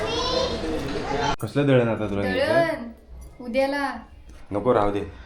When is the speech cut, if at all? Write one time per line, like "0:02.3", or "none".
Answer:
0:01.4